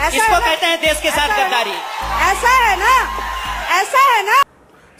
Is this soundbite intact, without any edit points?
yes; 0 cuts

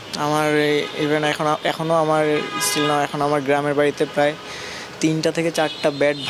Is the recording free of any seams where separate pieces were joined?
yes; 0 cuts

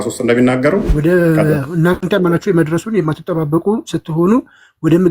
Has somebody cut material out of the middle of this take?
yes; 2 cuts; at 0.9 s, 2.0 s

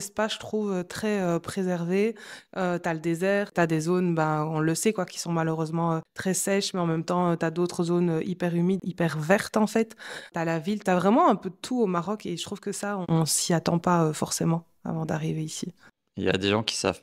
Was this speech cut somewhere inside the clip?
no; 0 cuts

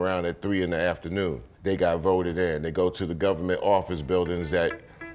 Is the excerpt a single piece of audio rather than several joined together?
yes; 0 cuts

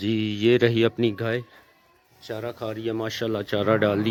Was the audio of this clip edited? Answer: no; 0 cuts

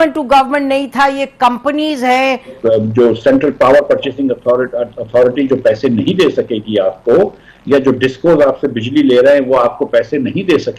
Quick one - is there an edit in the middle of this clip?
yes; 1 cut; at 2.6 s

